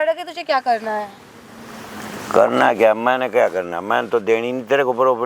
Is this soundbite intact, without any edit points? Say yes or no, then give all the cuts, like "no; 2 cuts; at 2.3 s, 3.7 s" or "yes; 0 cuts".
yes; 0 cuts